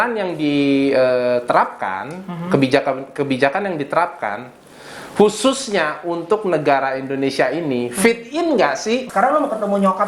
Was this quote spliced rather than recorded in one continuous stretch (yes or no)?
yes